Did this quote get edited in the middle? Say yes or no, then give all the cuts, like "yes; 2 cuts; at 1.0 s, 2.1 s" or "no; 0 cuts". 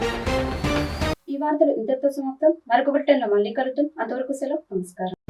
no; 0 cuts